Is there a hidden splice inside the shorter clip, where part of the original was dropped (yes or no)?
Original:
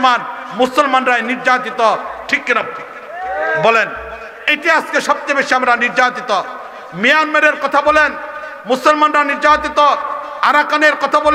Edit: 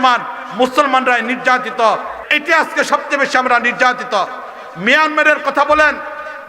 yes